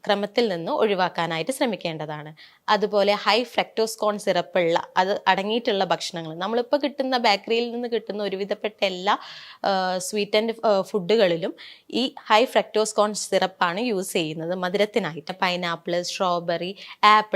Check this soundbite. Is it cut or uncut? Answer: cut